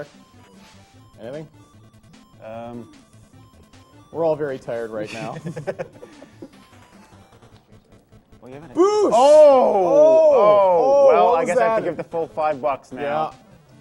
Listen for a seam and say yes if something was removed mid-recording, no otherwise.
no